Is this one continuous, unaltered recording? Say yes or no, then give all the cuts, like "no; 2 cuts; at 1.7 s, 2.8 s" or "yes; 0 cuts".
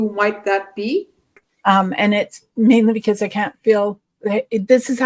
no; 1 cut; at 1.3 s